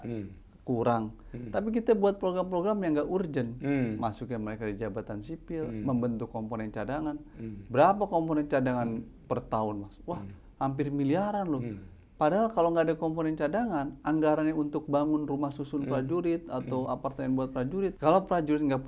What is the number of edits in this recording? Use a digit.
1